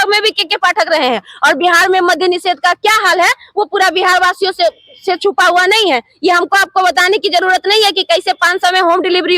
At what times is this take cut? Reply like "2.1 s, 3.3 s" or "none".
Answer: none